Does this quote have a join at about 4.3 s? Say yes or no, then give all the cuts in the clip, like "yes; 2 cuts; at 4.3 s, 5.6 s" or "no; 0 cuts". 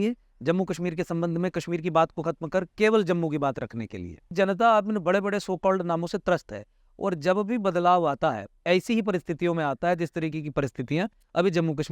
yes; 1 cut; at 4.3 s